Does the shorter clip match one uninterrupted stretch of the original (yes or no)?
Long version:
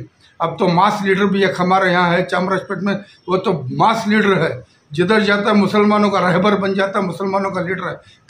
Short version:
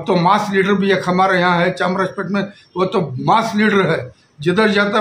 yes